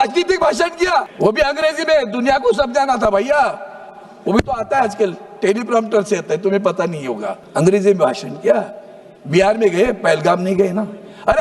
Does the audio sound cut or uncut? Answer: cut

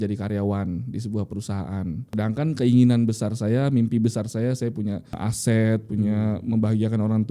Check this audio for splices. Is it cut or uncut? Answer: cut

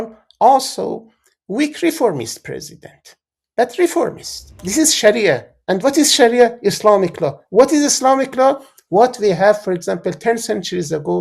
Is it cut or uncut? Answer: cut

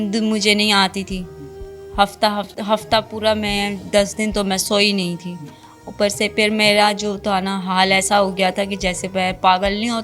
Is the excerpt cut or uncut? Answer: uncut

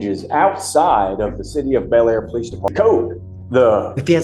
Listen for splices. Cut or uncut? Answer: cut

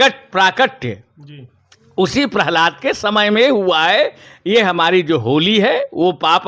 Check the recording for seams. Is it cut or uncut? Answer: uncut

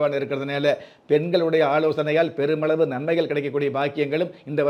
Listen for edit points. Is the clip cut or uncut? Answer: uncut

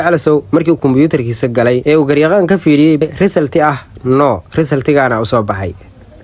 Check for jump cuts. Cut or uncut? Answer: cut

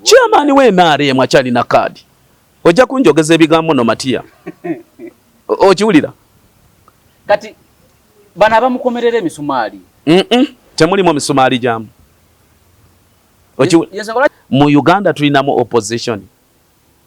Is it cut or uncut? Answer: cut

